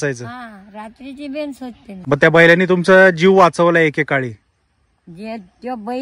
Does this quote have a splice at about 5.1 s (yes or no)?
no